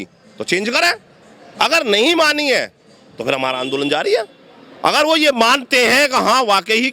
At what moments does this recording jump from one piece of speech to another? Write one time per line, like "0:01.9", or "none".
none